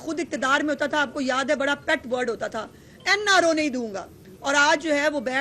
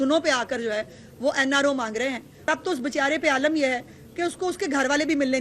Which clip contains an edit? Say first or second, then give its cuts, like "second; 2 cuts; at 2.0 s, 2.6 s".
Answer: second; 1 cut; at 2.3 s